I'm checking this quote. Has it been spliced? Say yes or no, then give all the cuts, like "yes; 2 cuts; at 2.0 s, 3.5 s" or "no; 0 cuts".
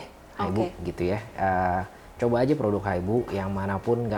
no; 0 cuts